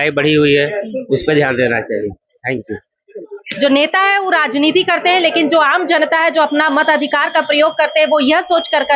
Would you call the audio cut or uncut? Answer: uncut